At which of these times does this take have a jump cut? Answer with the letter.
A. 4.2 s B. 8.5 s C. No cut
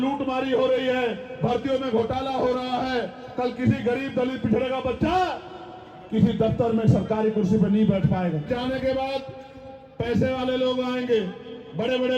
B